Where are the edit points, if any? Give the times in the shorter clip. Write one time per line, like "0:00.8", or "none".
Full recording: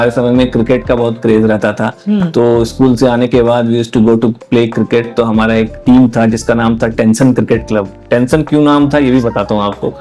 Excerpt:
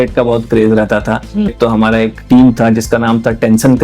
0:01.5